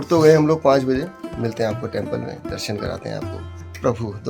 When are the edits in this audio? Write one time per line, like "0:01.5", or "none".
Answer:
0:01.2

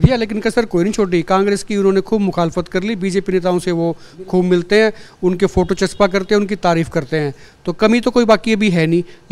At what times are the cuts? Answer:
none

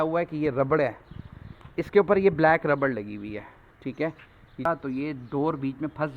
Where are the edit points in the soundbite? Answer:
0:04.6

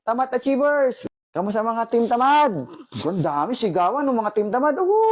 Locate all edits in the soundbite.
0:01.0

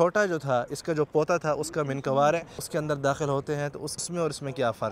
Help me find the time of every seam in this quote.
0:02.6
0:04.0

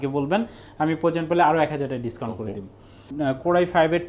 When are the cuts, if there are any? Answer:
0:03.0

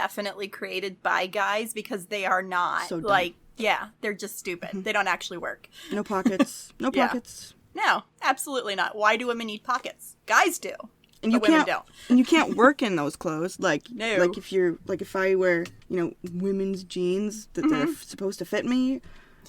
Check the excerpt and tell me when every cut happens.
0:15.8

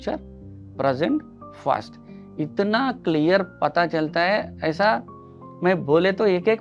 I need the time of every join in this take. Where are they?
none

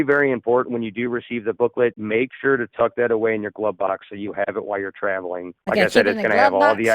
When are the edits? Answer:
0:01.8

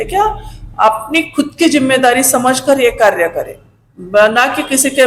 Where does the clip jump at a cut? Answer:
none

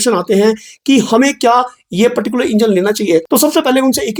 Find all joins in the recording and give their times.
none

